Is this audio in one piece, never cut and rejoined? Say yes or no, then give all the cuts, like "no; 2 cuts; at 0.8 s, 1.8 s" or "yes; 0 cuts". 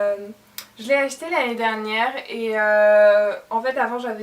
yes; 0 cuts